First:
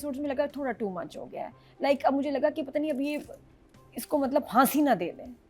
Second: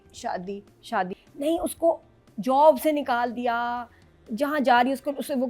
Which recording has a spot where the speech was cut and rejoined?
second; 1 cut; at 1.2 s

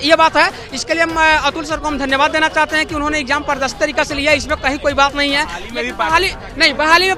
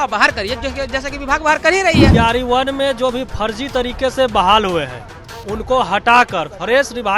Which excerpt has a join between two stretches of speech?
second; 1 cut; at 2.1 s

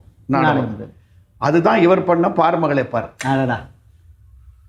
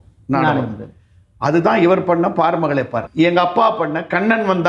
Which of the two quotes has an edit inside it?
second; 1 cut; at 3.0 s

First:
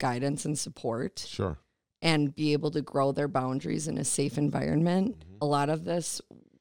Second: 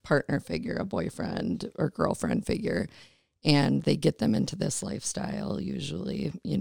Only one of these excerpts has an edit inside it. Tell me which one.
first; 1 cut; at 5.3 s

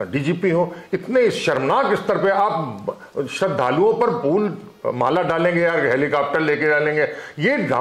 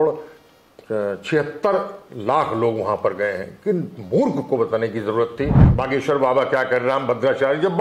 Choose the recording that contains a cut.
second; 1 cut; at 5.7 s

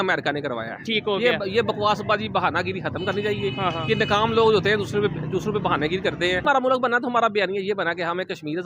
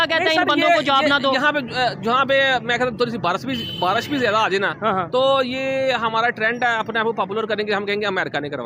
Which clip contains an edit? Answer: first; 1 cut; at 6.4 s

